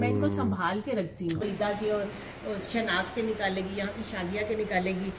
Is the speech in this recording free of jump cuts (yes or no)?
no